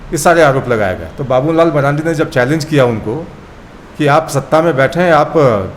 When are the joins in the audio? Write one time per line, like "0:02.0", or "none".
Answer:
none